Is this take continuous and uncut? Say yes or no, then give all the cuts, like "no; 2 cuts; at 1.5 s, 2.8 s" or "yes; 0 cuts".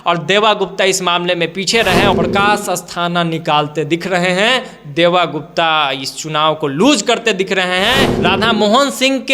no; 2 cuts; at 2.1 s, 8.1 s